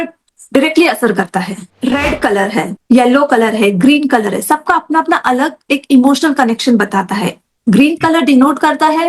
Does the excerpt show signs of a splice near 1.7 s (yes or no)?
yes